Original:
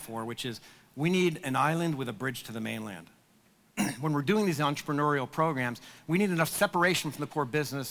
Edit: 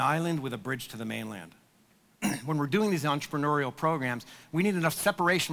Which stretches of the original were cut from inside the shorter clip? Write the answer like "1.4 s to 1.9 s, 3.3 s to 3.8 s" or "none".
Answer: none